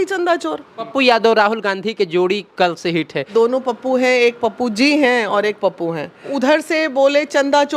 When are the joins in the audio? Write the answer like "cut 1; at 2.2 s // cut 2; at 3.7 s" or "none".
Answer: cut 1; at 0.9 s // cut 2; at 3.3 s // cut 3; at 6.3 s